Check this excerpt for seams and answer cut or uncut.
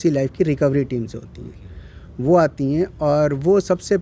uncut